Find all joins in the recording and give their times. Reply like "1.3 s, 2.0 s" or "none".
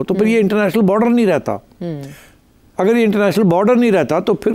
none